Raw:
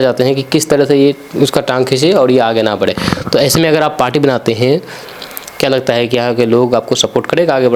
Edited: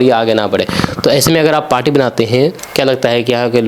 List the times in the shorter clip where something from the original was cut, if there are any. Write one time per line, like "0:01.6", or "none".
0:02.6